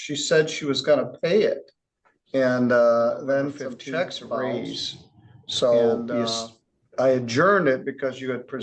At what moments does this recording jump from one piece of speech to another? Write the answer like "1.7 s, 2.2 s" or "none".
4.4 s